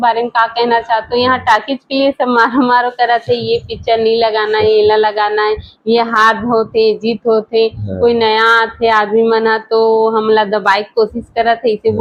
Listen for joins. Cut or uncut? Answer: uncut